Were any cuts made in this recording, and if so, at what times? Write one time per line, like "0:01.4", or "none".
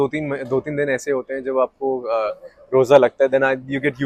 none